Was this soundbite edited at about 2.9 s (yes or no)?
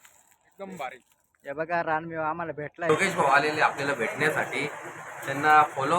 yes